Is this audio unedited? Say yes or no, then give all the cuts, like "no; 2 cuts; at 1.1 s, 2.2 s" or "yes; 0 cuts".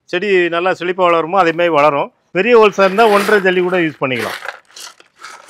no; 1 cut; at 2.2 s